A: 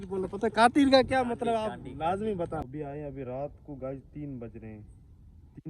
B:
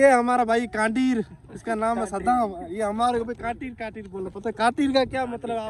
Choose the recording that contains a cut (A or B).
A